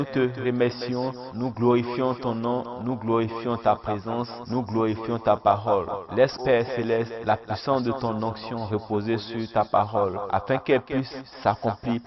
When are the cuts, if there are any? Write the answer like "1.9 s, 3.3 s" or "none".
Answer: 6.4 s